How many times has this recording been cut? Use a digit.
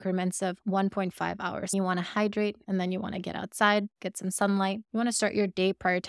1